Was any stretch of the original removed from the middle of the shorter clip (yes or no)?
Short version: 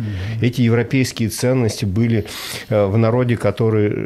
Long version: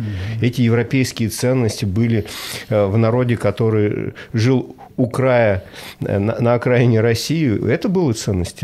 no